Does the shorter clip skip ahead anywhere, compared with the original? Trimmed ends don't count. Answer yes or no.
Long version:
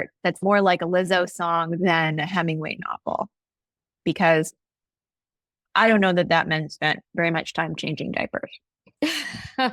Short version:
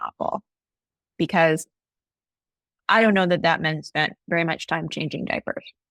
no